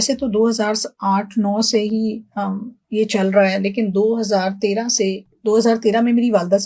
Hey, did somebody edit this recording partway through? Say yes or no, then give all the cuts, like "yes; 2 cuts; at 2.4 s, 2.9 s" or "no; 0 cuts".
no; 0 cuts